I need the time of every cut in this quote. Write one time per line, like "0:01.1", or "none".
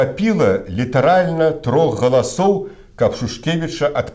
none